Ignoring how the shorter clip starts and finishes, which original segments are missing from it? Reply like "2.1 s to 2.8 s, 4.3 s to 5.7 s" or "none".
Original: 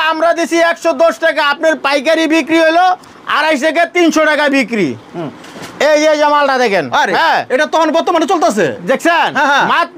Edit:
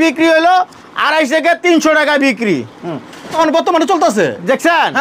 5.6 s to 7.7 s